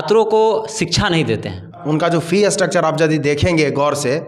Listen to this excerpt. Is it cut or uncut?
cut